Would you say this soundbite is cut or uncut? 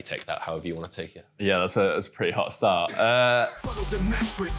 cut